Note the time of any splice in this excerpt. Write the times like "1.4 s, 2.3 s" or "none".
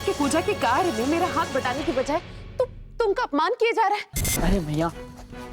4.2 s